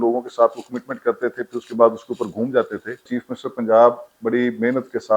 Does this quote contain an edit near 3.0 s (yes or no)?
yes